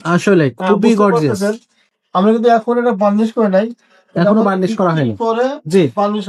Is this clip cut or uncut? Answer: uncut